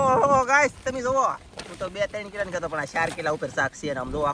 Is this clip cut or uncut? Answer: uncut